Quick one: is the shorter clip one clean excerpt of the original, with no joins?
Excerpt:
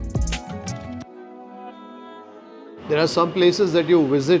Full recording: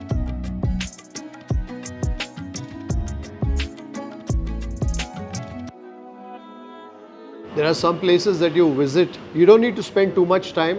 yes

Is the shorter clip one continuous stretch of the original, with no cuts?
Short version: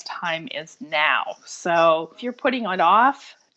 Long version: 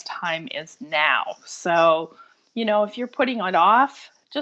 no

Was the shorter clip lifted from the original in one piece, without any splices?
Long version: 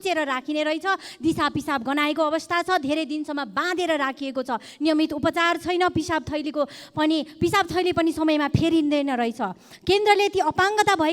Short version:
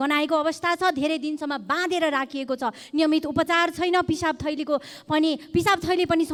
yes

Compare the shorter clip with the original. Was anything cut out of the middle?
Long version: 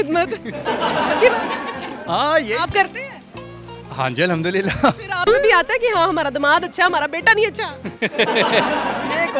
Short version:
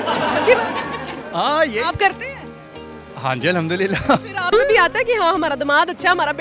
no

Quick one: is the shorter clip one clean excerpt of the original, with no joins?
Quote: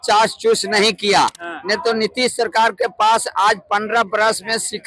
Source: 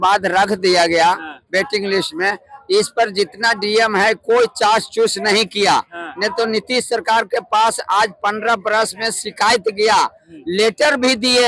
yes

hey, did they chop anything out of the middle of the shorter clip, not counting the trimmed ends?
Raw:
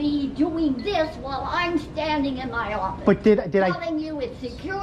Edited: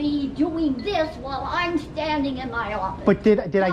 no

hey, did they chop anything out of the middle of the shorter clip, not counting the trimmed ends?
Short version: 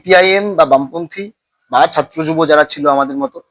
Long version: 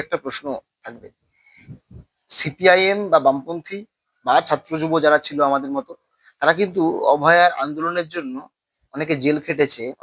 no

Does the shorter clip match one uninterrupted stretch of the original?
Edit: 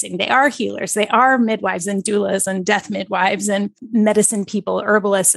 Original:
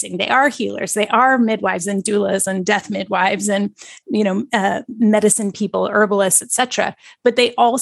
no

